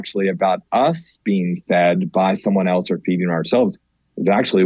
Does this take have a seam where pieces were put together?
no; 0 cuts

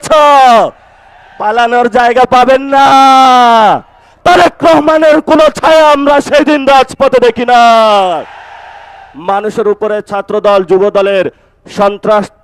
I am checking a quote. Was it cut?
yes; 2 cuts; at 4.1 s, 9.0 s

